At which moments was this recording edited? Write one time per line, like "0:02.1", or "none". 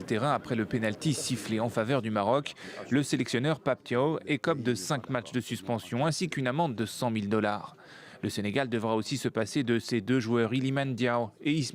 0:08.4